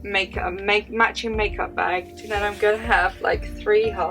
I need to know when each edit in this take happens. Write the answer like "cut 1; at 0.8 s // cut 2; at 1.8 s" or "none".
cut 1; at 2.1 s

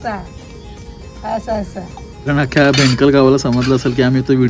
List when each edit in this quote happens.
cut 1; at 2.3 s

